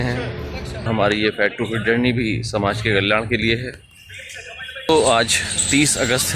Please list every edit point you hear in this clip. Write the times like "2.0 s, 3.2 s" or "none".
0.9 s, 4.9 s